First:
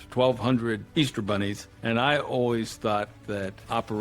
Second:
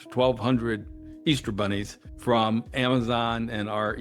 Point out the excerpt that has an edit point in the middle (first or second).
first